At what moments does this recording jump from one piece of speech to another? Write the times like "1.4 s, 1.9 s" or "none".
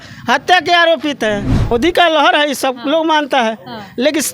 1.7 s